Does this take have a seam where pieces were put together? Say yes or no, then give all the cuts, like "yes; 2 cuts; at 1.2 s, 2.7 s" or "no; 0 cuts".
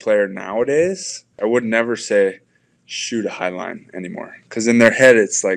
yes; 1 cut; at 1.3 s